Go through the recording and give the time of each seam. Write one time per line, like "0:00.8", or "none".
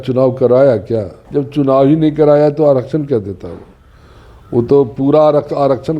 0:01.2